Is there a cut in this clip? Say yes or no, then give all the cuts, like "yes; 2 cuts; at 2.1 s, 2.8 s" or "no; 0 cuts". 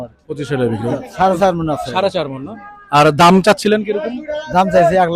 yes; 1 cut; at 1.0 s